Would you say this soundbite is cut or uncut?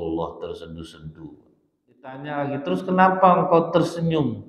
cut